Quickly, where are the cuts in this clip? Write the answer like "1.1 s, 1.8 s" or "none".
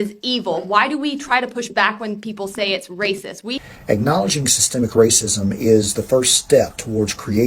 3.6 s